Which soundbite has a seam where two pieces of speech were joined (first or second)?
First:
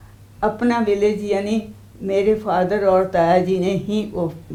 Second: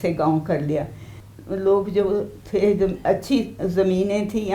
second